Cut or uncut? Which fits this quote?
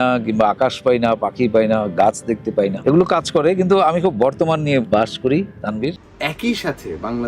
cut